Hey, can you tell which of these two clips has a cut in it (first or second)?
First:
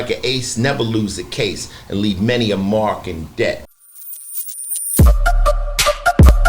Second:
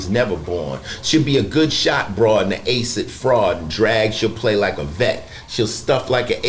first